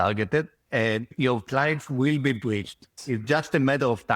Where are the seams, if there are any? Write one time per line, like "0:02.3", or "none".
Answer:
0:01.1
0:02.9